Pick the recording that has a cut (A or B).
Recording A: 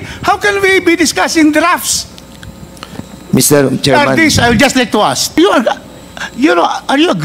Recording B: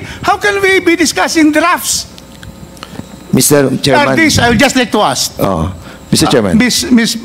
A